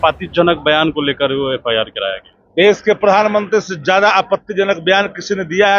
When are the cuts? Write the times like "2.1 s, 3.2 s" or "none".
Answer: none